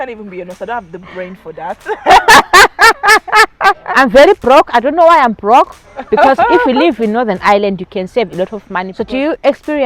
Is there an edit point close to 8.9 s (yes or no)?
yes